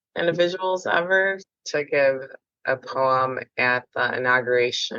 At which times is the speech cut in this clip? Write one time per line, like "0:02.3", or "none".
0:01.5